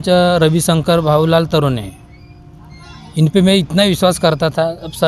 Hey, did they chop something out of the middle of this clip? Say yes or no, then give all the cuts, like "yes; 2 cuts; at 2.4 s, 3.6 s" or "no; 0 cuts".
no; 0 cuts